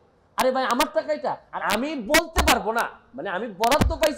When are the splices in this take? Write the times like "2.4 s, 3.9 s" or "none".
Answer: 1.5 s